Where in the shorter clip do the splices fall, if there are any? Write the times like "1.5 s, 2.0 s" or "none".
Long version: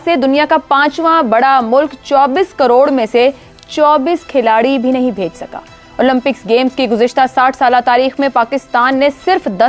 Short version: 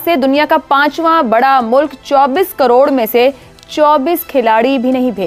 none

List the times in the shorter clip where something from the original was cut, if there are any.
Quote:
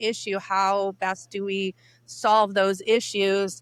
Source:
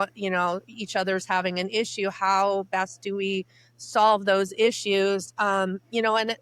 none

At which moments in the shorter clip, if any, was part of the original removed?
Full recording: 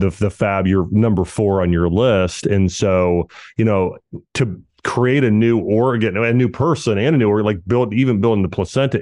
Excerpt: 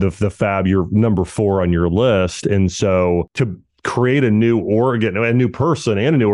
3.3 s

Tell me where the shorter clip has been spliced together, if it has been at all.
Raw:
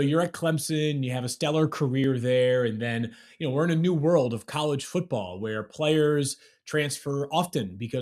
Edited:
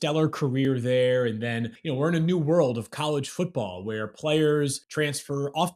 1.8 s, 4.8 s

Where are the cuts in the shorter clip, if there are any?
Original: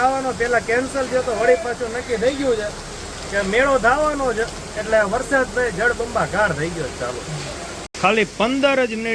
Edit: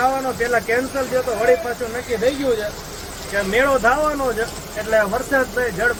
none

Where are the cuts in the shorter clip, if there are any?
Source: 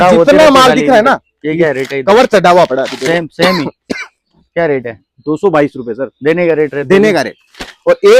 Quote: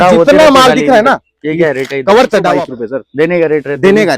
2.5 s

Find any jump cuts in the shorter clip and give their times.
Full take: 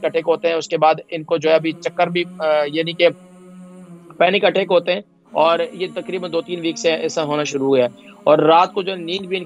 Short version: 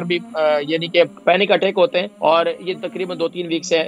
1.2 s, 2.1 s

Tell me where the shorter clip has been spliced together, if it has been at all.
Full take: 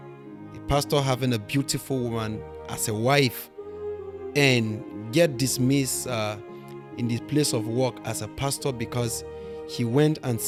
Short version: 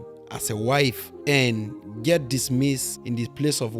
1.1 s, 2.9 s

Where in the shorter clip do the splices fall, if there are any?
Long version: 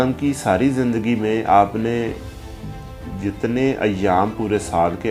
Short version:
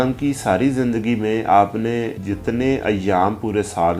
2.2 s

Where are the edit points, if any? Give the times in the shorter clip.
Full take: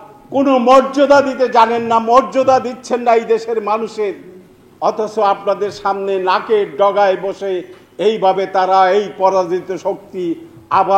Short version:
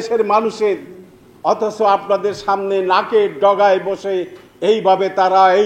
none

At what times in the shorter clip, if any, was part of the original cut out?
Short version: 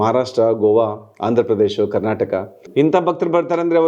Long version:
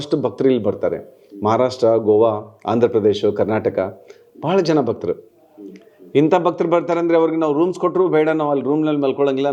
2.6 s

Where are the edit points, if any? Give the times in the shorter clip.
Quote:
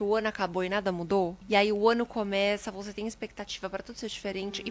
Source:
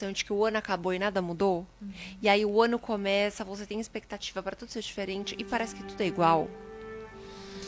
1.4 s

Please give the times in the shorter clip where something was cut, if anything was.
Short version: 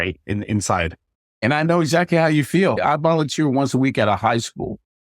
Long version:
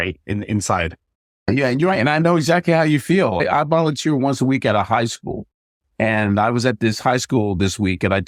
1.4 s, 2.8 s

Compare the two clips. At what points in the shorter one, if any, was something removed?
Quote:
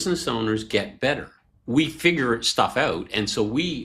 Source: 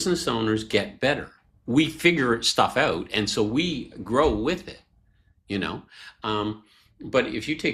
none

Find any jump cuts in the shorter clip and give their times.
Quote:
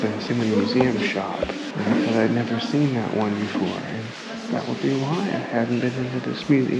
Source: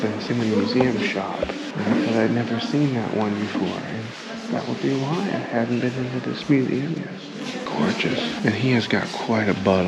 none

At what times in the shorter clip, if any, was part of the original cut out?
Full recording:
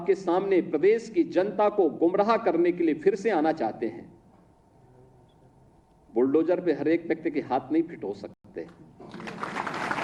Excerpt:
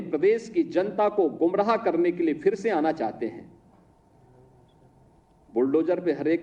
none

